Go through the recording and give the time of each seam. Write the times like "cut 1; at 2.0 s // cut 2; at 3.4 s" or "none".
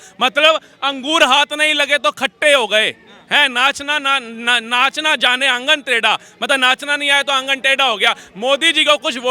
none